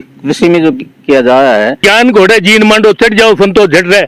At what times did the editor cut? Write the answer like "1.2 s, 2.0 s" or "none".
1.8 s